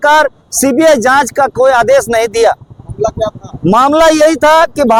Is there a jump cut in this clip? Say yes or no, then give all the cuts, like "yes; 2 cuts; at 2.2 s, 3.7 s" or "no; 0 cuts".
no; 0 cuts